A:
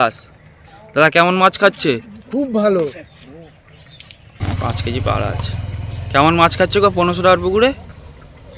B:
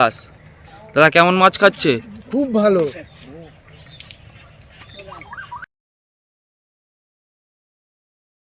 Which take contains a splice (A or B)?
A